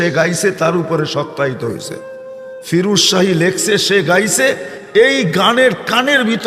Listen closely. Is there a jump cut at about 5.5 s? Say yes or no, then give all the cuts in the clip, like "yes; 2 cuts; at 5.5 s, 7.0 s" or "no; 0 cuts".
no; 1 cut; at 4.3 s